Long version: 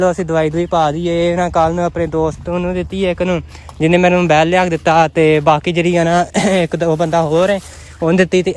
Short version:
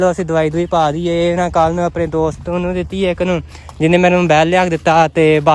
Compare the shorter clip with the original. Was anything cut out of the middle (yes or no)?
no